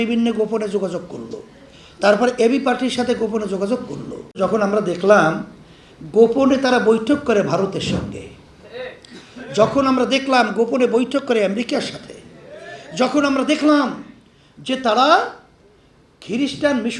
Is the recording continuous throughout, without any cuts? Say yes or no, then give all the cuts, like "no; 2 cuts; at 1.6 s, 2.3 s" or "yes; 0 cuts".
no; 1 cut; at 4.4 s